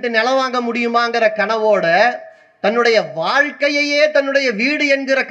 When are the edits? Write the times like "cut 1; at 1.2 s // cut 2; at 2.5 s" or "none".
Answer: none